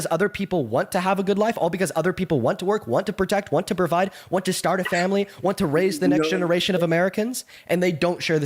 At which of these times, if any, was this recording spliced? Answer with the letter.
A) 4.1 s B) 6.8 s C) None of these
C